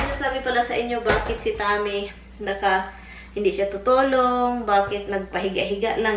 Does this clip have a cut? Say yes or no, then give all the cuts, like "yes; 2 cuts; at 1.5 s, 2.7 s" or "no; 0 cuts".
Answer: no; 0 cuts